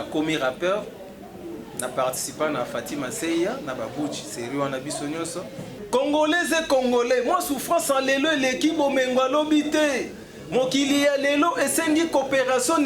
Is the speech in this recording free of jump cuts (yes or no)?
no